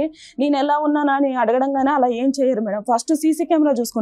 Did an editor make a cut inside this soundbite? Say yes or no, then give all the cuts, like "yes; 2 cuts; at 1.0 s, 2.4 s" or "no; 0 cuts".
no; 0 cuts